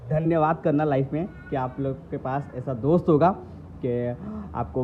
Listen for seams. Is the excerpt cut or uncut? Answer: uncut